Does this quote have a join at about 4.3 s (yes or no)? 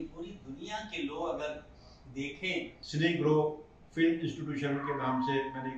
no